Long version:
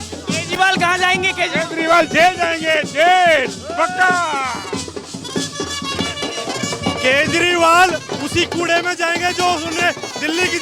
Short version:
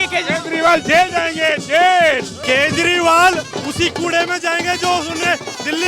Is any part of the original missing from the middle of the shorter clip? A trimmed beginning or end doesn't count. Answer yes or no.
yes